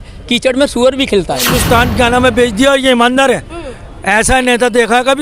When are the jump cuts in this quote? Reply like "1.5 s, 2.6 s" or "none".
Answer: 1.6 s